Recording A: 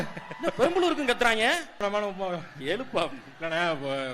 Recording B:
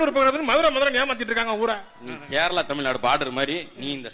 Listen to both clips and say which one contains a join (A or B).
A